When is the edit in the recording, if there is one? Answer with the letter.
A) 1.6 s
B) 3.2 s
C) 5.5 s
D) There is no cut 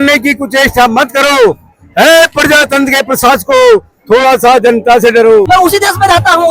C